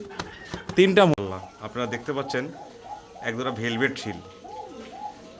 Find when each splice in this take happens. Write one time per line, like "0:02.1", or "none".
0:01.1

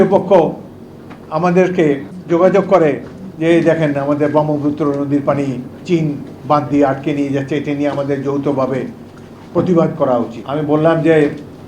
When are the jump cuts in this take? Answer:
0:02.1
0:10.4

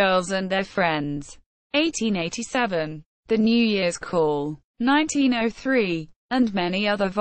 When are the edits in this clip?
0:06.1

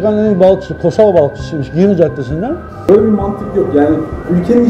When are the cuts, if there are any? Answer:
0:02.7

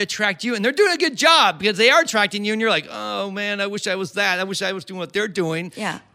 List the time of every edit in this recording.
none

